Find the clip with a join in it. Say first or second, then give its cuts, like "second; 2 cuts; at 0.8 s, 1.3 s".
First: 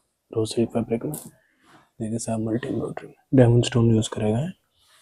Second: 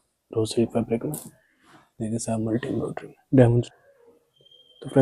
second; 1 cut; at 3.7 s